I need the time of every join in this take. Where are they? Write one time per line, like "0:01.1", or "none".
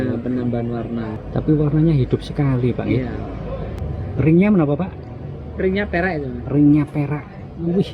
0:01.2
0:03.8